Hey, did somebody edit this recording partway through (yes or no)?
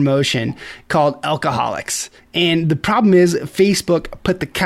no